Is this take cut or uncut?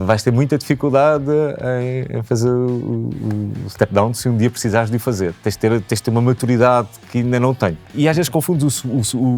cut